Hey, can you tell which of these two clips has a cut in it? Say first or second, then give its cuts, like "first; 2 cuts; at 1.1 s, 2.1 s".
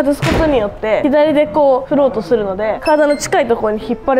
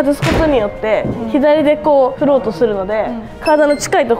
first; 2 cuts; at 1.0 s, 2.8 s